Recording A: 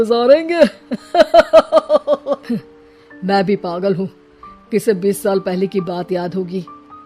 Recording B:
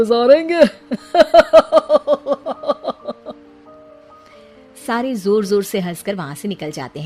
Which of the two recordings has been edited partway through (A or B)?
A